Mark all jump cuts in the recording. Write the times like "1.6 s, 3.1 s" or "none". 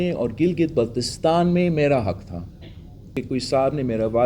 3.1 s